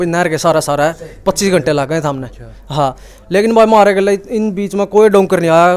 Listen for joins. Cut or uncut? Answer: uncut